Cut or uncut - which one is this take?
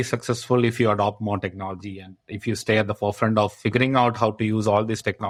uncut